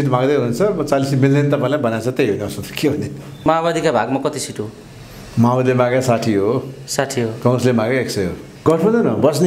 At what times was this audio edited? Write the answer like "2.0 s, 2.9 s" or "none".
3.5 s, 8.6 s

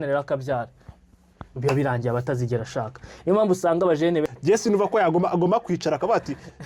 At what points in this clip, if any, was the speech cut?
4.2 s

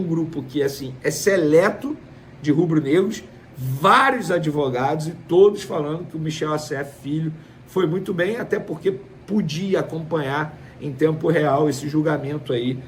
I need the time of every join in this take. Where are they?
none

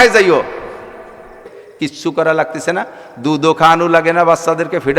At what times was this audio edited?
1.4 s

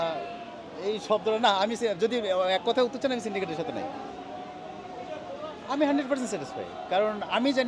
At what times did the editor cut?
5.6 s

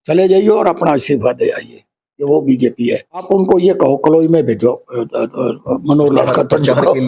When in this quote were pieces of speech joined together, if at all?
3.2 s

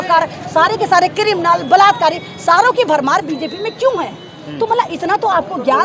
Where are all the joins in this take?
none

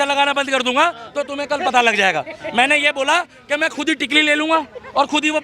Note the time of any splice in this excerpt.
none

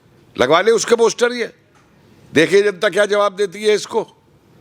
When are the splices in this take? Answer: none

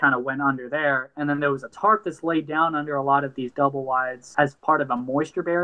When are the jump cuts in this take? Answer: 1.7 s, 4.4 s

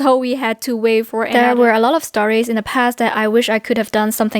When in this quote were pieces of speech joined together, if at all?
1.3 s

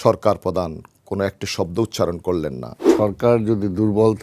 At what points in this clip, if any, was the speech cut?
2.9 s

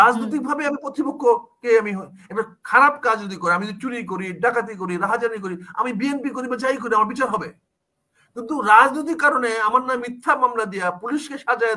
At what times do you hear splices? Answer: none

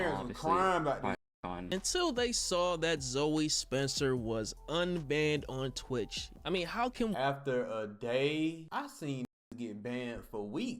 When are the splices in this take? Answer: 1.6 s, 8.6 s

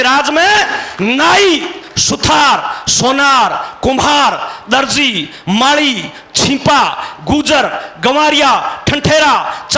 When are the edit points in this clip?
none

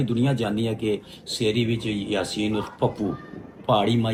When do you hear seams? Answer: none

